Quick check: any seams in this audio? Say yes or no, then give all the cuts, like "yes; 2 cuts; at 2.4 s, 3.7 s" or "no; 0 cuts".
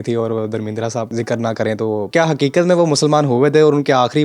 yes; 2 cuts; at 1.1 s, 2.1 s